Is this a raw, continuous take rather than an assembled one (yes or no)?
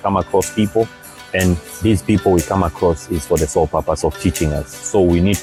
yes